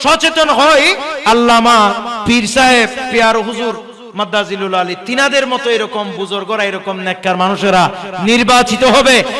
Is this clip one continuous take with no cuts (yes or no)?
no